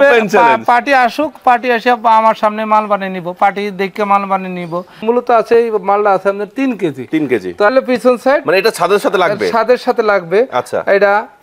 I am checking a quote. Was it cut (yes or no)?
yes